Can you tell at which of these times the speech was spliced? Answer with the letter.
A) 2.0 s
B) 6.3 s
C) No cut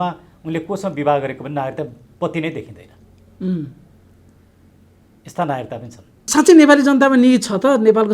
B